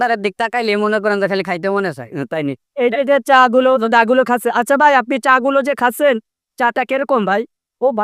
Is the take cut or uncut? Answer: uncut